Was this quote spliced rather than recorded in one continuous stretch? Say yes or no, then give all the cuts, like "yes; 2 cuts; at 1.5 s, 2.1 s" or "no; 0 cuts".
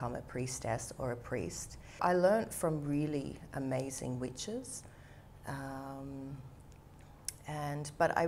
yes; 1 cut; at 2.0 s